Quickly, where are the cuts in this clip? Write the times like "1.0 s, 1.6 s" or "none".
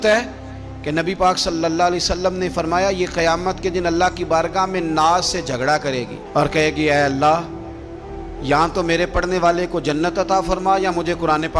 none